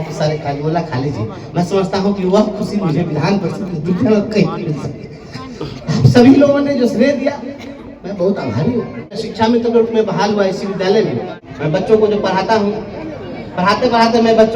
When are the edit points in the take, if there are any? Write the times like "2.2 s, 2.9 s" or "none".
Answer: 9.2 s, 11.9 s